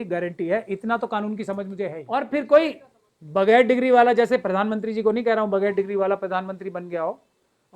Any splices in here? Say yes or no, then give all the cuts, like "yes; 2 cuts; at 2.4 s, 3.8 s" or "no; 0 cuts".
yes; 1 cut; at 2.0 s